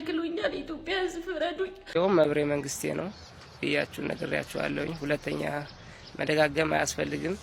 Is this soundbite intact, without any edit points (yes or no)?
no